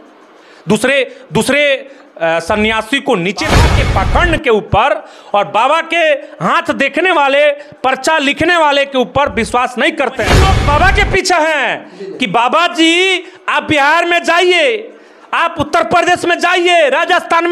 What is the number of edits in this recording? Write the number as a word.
two